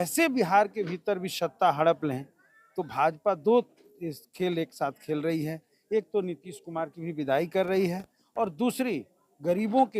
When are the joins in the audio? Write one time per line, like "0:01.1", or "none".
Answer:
none